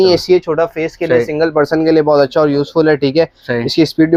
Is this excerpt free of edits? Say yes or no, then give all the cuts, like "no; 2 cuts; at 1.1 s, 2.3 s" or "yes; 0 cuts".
yes; 0 cuts